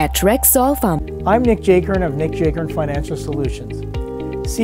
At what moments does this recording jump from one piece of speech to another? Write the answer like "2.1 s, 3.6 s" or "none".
1.1 s